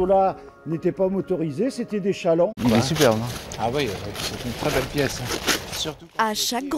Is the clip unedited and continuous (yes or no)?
yes